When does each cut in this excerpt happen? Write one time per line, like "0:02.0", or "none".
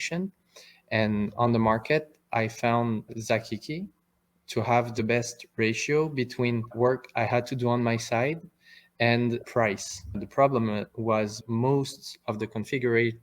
none